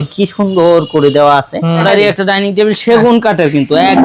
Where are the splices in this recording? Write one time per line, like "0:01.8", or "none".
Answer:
0:01.8